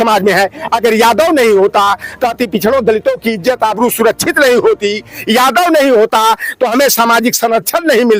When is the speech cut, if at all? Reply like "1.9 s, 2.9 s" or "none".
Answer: none